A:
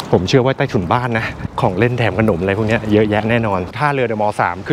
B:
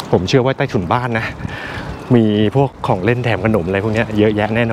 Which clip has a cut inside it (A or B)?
A